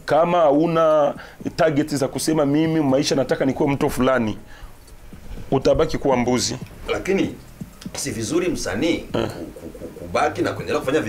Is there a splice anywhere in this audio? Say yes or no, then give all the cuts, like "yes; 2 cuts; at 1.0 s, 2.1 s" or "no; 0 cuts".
no; 0 cuts